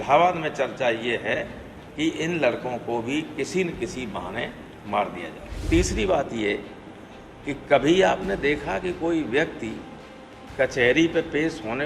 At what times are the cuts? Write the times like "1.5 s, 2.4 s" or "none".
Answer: 5.6 s